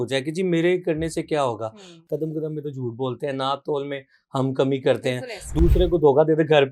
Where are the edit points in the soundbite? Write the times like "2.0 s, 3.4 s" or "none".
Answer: 1.9 s